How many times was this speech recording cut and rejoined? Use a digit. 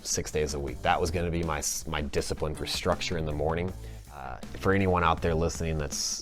1